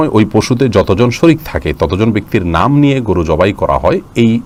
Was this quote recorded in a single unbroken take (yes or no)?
yes